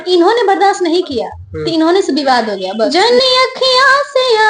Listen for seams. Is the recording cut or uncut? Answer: cut